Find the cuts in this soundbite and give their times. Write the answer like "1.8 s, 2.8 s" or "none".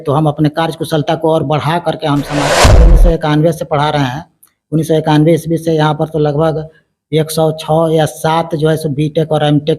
2.9 s